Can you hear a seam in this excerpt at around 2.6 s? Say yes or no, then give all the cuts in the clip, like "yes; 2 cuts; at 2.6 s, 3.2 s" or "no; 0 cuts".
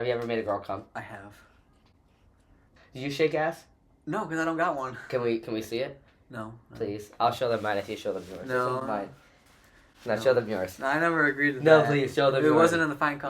yes; 1 cut; at 2.6 s